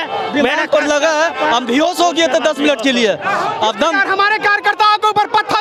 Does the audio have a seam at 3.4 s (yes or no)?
no